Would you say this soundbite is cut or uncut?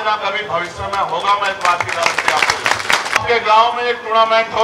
cut